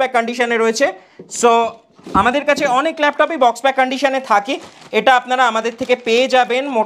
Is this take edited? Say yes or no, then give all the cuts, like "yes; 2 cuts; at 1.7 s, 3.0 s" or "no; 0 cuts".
no; 0 cuts